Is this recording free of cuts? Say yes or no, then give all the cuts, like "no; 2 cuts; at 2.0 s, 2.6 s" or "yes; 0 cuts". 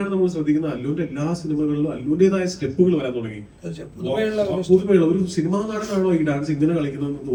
yes; 0 cuts